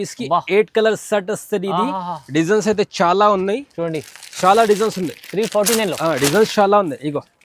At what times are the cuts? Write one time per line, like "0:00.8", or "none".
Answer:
none